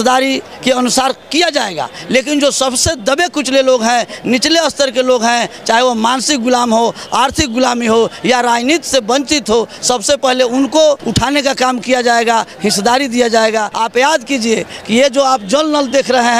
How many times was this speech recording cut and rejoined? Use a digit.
2